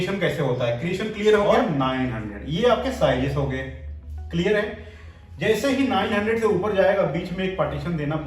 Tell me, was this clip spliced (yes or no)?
yes